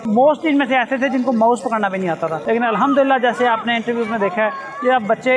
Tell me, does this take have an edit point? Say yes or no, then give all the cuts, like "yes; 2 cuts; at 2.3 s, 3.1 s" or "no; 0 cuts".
no; 0 cuts